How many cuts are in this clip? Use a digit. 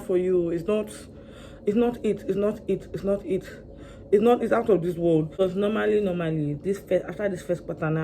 1